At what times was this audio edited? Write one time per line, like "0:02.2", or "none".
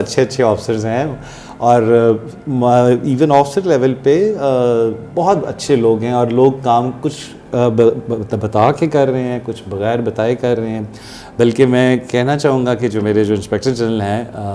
none